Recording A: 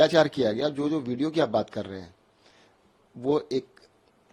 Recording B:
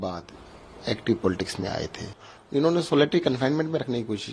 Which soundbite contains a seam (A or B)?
B